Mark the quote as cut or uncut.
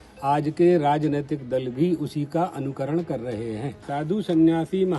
cut